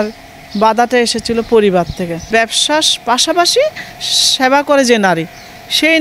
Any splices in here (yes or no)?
yes